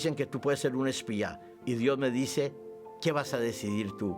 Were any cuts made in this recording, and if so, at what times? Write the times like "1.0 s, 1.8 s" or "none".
1.5 s